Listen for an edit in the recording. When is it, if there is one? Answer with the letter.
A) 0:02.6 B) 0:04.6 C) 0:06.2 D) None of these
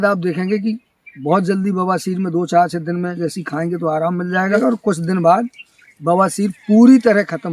B